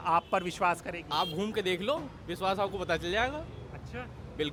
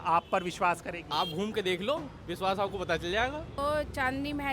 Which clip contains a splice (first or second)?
second